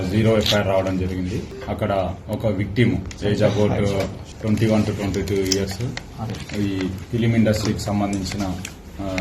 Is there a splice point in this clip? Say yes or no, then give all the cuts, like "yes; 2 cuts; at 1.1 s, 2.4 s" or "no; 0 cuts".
yes; 2 cuts; at 1.5 s, 4.3 s